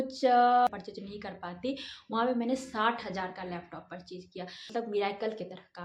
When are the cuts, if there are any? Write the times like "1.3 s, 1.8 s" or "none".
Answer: 0.7 s, 4.7 s